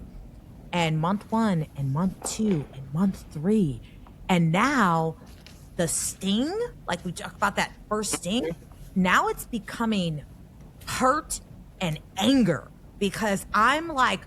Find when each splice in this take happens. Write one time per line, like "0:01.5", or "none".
none